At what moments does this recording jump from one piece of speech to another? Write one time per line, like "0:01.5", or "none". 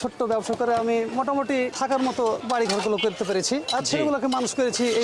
0:01.7
0:02.4